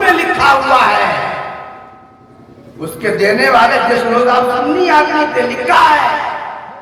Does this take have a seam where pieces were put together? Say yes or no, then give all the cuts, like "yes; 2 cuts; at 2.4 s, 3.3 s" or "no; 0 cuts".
no; 0 cuts